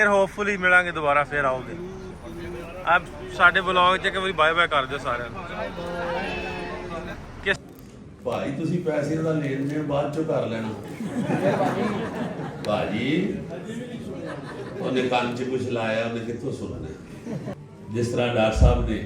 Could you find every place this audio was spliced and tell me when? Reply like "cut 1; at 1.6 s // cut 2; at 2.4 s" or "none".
cut 1; at 7.6 s // cut 2; at 17.5 s